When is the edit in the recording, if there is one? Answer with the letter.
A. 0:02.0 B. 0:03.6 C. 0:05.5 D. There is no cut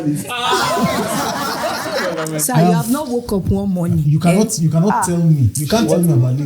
A